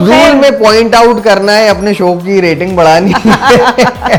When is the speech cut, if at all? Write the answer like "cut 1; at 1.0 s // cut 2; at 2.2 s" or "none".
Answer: none